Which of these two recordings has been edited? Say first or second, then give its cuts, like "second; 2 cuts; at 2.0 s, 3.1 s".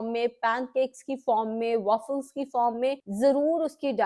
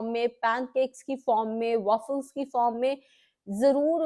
first; 1 cut; at 3.1 s